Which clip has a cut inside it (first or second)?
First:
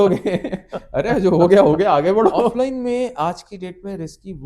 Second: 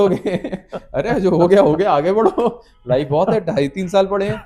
first